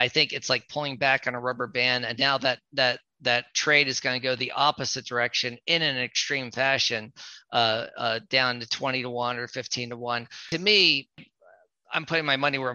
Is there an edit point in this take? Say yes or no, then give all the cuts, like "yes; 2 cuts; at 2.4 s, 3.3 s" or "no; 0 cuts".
yes; 2 cuts; at 10.4 s, 11.2 s